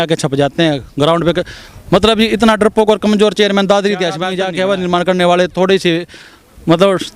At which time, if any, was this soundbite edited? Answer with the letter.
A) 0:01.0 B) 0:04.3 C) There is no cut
B